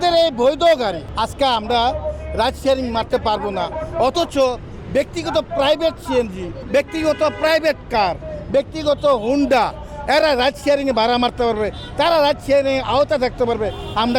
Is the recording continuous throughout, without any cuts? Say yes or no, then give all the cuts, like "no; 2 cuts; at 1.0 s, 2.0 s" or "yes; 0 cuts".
no; 2 cuts; at 1.0 s, 6.6 s